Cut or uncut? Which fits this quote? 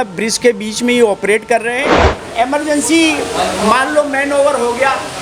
cut